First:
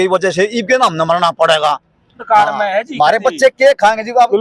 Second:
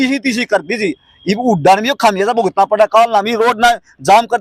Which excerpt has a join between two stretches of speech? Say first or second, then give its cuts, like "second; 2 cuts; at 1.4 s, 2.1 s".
first; 1 cut; at 2.2 s